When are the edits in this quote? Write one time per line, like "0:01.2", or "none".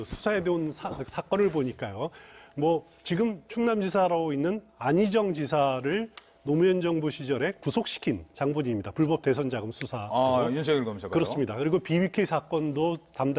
none